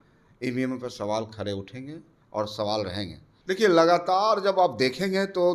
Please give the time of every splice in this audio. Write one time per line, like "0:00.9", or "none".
0:03.2